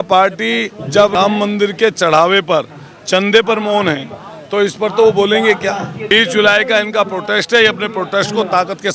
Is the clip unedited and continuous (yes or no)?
no